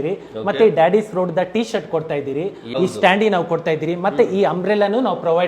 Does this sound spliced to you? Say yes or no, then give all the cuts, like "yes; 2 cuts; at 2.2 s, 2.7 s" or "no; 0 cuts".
yes; 1 cut; at 2.6 s